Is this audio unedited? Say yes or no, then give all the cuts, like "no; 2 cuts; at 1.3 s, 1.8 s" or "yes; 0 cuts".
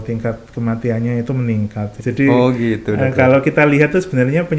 no; 1 cut; at 2.0 s